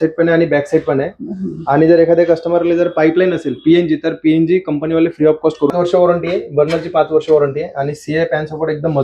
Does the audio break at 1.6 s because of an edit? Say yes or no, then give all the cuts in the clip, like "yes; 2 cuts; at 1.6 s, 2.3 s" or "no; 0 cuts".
no; 1 cut; at 5.7 s